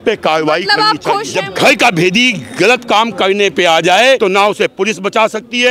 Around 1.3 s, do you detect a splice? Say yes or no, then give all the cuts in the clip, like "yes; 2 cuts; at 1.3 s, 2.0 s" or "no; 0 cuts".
yes; 2 cuts; at 1.3 s, 4.2 s